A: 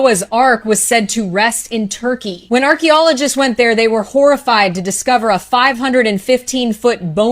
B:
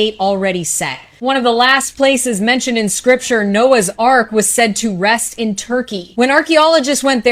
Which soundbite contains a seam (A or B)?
A